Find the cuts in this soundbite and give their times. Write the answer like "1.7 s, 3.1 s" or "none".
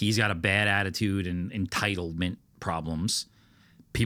none